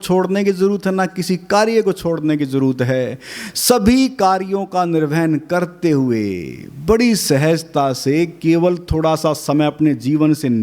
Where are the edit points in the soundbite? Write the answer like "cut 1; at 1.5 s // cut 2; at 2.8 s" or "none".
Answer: none

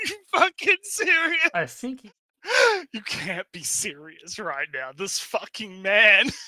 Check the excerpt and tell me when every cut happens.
cut 1; at 1.8 s

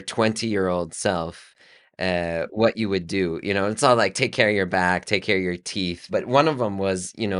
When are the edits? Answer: cut 1; at 6.1 s

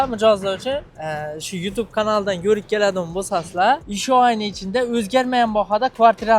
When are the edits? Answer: cut 1; at 0.9 s // cut 2; at 3.9 s

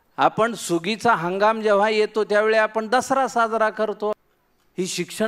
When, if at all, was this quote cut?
cut 1; at 4.1 s

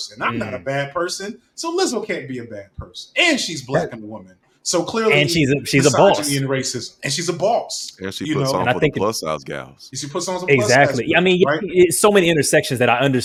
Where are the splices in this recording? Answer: none

